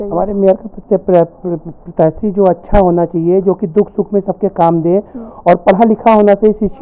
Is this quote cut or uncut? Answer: uncut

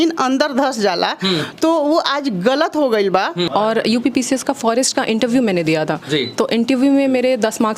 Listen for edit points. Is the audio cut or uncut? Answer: cut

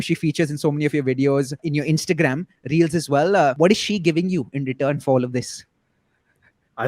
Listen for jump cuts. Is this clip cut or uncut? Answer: cut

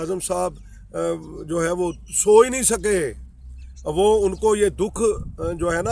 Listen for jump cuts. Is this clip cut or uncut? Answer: uncut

